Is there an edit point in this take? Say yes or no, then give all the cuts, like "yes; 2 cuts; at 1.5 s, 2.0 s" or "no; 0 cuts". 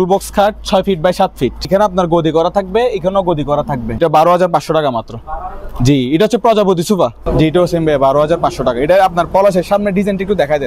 yes; 3 cuts; at 1.7 s, 4.0 s, 7.2 s